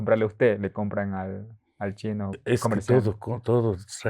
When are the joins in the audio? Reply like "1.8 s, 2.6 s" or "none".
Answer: 2.4 s